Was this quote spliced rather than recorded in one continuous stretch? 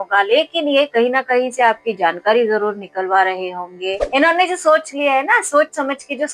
yes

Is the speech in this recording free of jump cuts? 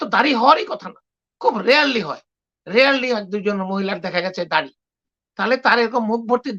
yes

